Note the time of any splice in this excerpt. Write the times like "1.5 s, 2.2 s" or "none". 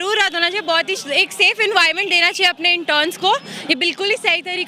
none